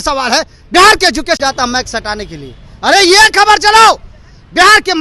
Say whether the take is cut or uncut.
uncut